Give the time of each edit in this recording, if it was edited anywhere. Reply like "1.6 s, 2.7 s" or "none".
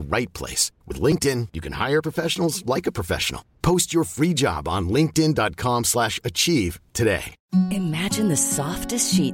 7.3 s